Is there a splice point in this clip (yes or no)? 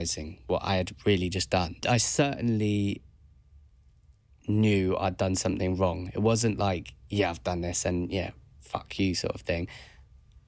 yes